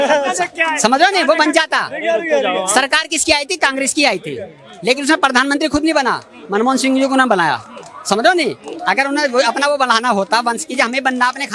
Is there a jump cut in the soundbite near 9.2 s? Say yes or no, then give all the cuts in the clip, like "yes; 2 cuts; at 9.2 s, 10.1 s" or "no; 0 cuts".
no; 0 cuts